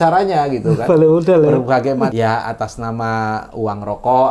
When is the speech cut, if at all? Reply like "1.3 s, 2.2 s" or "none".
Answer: 2.1 s